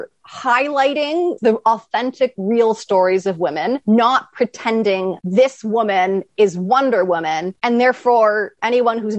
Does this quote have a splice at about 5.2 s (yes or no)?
yes